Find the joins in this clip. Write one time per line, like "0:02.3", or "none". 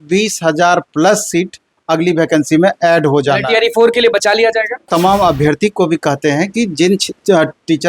0:04.9